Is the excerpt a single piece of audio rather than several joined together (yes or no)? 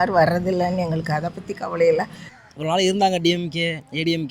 no